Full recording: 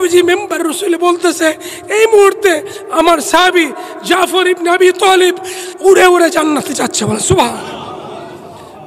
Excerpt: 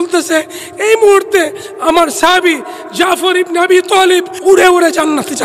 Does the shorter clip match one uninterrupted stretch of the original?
no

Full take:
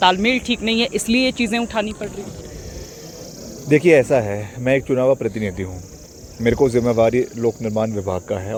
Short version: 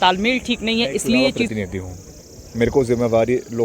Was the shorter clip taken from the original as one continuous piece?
no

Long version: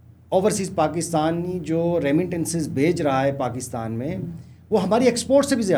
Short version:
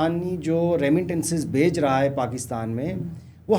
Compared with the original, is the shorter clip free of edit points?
yes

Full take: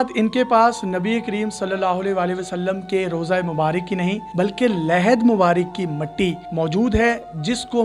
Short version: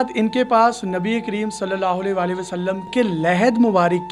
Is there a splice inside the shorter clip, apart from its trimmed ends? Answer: yes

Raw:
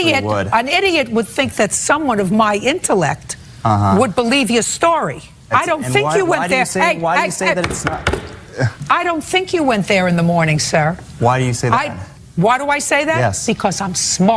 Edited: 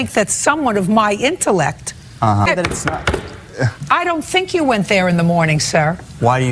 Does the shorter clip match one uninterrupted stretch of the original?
no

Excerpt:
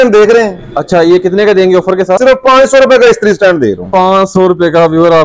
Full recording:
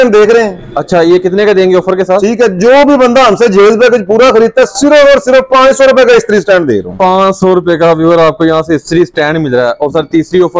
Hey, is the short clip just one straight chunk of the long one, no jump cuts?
no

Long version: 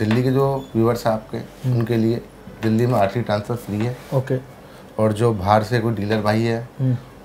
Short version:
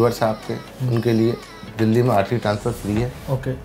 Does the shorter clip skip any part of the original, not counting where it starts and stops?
no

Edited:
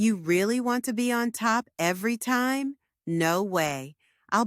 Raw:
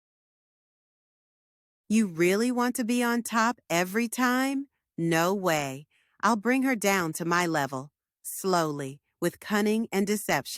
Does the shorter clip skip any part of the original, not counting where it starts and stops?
no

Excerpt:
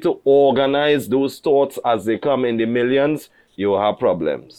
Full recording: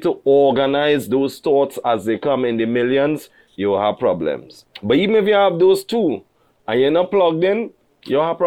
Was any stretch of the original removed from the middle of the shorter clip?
no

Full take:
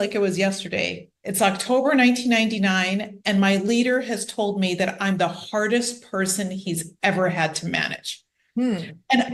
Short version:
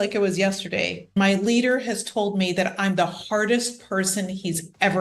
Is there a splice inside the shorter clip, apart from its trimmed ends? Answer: yes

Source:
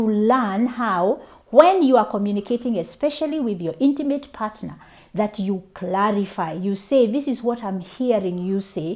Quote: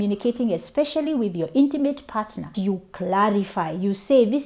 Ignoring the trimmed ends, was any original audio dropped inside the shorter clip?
yes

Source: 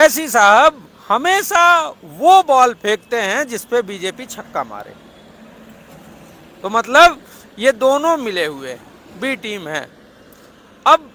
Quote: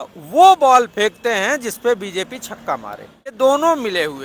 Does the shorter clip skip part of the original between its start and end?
yes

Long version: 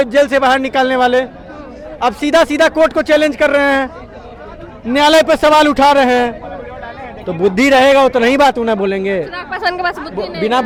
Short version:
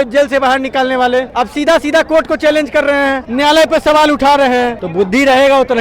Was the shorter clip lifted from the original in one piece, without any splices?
no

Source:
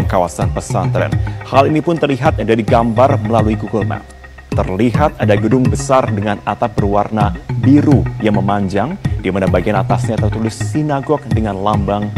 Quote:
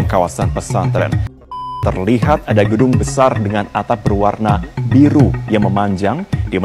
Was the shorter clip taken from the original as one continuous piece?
no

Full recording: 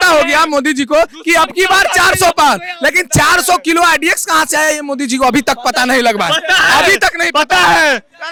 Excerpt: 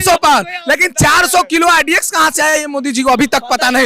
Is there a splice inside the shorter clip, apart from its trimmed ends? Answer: no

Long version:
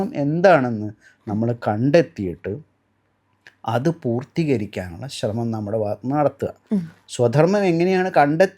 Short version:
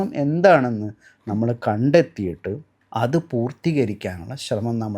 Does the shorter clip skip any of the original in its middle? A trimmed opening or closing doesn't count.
yes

